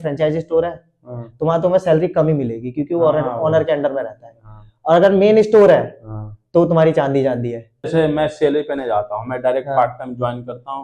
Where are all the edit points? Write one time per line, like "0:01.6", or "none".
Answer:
0:07.9